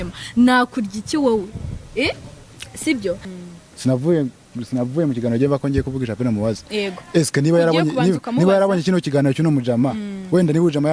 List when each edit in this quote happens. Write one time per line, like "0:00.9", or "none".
0:03.3